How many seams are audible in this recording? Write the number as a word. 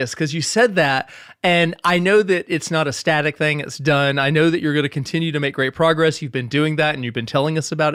zero